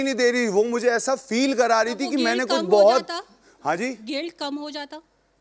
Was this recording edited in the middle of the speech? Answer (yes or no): no